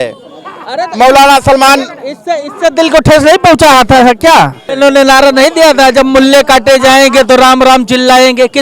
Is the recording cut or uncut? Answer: cut